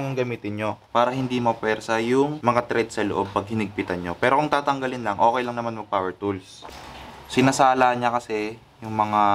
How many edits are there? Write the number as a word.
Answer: one